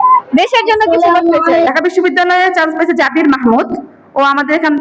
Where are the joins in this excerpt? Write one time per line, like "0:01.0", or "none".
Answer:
0:01.7